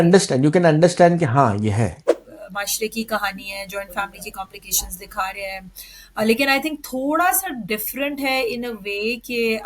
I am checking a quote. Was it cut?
yes; 1 cut; at 2.1 s

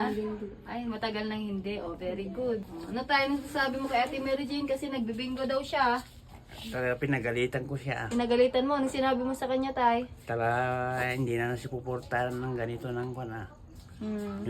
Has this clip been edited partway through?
yes; 1 cut; at 2.7 s

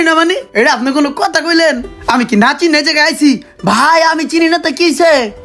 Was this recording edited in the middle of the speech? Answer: no; 0 cuts

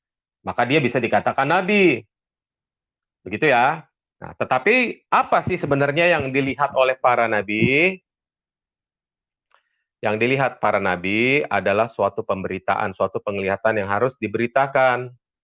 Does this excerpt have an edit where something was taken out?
no; 0 cuts

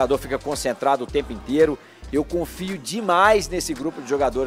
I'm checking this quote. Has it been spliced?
no; 0 cuts

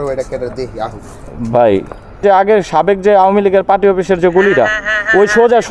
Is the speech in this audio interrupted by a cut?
yes; 1 cut; at 2.2 s

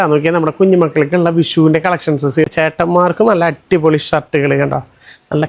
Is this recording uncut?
no; 1 cut; at 2.5 s

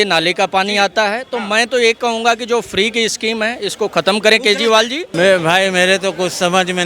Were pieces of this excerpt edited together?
yes; 1 cut; at 5.1 s

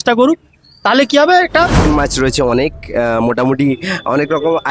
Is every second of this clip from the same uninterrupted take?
no; 1 cut; at 1.9 s

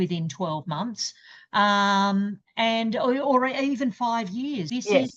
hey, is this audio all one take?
yes; 0 cuts

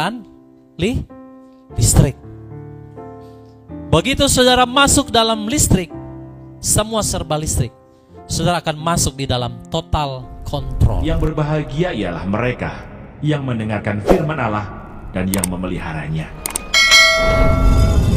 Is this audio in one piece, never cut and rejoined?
no; 1 cut; at 11.0 s

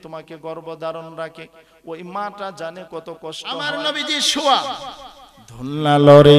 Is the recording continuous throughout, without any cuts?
no; 1 cut; at 3.7 s

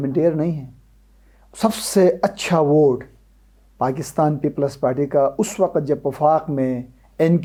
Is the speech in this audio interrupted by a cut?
no; 0 cuts

